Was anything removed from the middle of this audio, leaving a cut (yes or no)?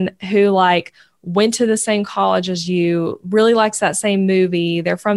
no